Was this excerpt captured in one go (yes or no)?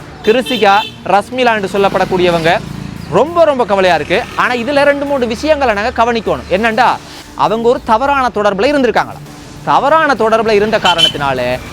no